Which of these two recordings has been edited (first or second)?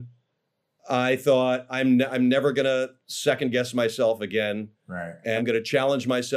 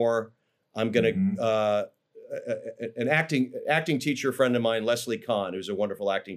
first